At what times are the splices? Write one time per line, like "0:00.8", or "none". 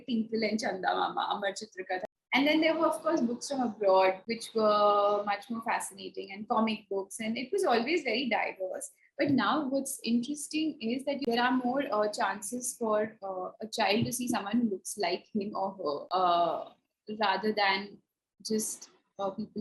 0:02.0
0:04.3
0:11.2
0:16.0